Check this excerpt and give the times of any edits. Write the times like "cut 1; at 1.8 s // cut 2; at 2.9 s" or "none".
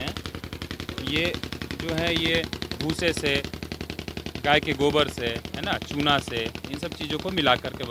none